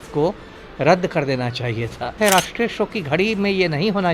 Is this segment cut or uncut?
cut